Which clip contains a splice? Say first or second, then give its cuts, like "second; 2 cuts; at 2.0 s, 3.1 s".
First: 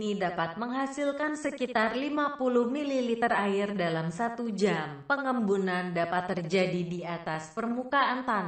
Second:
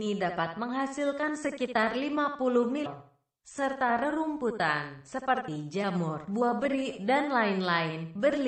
first; 1 cut; at 2.9 s